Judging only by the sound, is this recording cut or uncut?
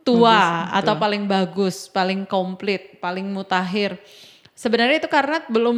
uncut